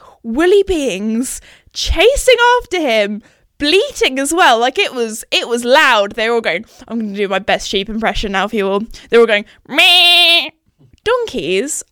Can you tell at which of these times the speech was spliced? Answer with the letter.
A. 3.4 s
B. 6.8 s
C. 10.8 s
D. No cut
C